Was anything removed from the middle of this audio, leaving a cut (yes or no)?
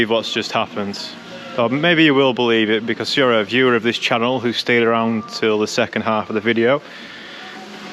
no